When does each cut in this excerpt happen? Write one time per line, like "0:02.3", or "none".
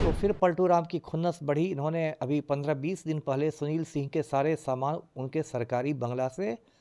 none